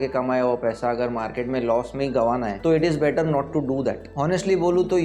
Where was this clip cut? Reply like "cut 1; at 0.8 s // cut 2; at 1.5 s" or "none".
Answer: cut 1; at 2.5 s // cut 2; at 4.1 s